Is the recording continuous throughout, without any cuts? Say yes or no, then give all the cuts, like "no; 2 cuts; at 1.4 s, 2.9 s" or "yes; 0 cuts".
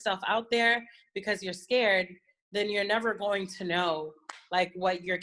yes; 0 cuts